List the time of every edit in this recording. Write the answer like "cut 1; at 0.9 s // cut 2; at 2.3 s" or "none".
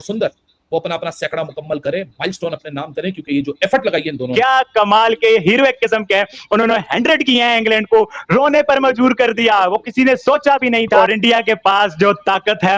cut 1; at 4.3 s // cut 2; at 10.9 s